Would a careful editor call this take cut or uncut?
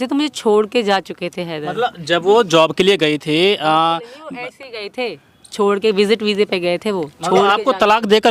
uncut